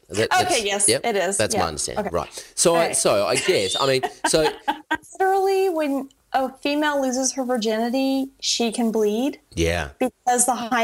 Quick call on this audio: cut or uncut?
cut